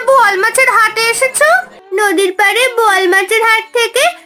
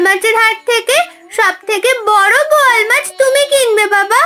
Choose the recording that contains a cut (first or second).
first